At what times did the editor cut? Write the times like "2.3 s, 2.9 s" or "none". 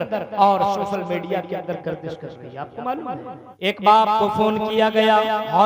3.5 s